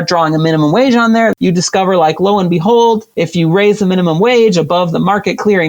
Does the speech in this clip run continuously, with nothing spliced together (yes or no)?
no